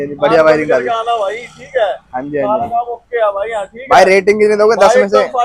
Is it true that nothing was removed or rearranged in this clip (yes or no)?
yes